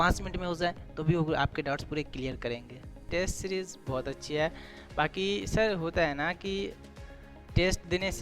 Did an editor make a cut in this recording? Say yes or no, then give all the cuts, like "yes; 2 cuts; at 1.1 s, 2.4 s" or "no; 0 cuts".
yes; 1 cut; at 3.1 s